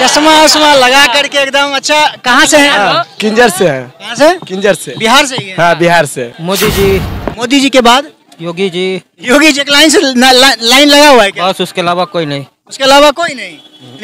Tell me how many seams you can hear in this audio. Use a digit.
1